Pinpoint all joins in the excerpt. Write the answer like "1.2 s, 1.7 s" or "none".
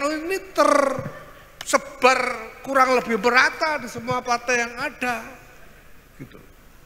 none